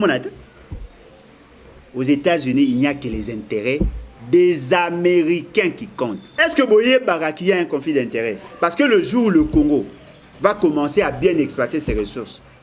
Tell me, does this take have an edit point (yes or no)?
yes